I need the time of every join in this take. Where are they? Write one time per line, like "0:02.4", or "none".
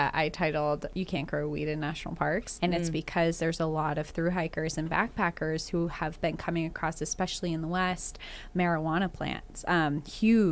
0:00.9
0:02.5